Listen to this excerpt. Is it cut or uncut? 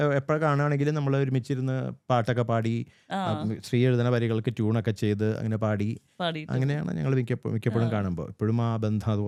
uncut